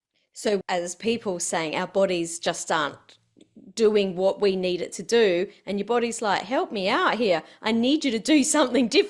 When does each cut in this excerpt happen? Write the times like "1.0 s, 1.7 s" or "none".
none